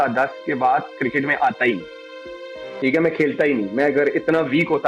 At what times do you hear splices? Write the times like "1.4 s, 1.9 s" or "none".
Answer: none